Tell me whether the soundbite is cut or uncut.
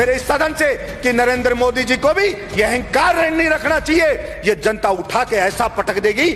uncut